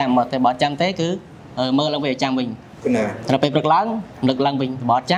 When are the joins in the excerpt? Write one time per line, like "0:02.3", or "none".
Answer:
none